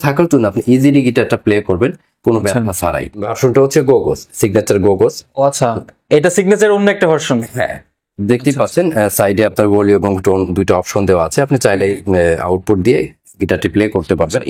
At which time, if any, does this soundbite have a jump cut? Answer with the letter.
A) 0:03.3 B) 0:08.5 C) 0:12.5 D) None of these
A